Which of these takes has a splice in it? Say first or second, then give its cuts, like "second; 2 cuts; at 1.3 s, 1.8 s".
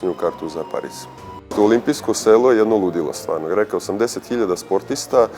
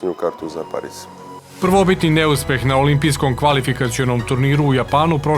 first; 1 cut; at 1.5 s